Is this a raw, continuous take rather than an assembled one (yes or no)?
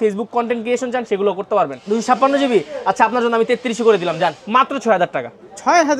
no